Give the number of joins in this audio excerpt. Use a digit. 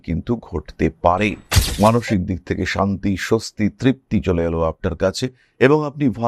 1